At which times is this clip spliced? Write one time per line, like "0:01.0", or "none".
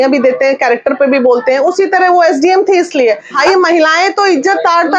0:03.3